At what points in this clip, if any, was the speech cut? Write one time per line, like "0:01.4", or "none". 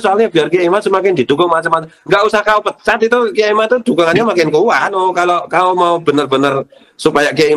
0:04.9